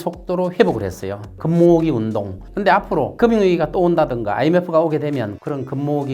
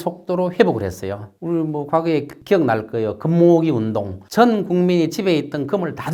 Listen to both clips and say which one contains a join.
first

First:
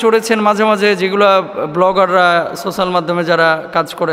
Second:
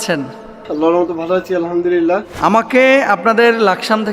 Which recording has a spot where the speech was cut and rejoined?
second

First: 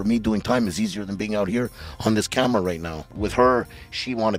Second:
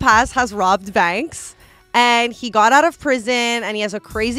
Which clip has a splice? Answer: first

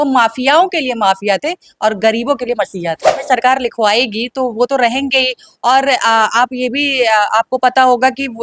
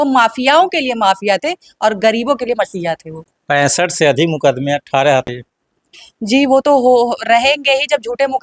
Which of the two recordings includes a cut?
first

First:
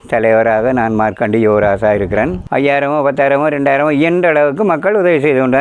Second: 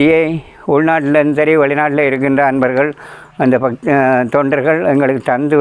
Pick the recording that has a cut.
first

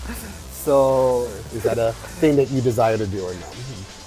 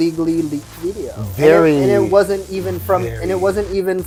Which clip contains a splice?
first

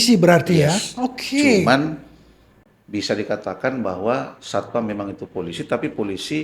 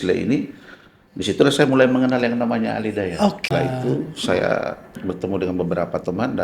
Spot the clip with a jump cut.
second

